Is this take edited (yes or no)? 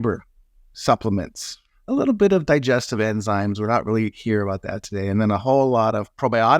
yes